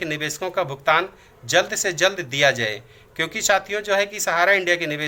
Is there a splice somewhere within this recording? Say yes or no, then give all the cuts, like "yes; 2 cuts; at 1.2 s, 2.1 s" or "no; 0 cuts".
no; 0 cuts